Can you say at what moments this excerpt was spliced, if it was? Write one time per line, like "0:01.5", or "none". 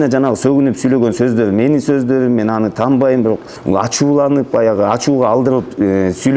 0:03.5